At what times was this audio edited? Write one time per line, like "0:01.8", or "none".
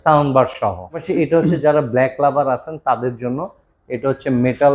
0:01.0